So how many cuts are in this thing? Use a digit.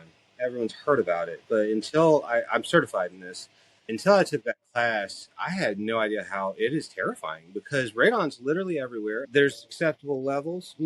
1